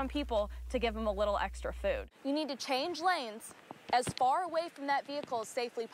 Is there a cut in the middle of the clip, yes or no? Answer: yes